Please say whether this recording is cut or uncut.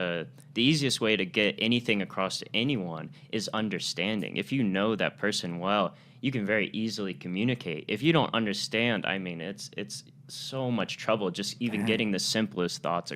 uncut